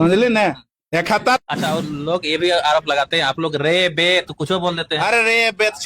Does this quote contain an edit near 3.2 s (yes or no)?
no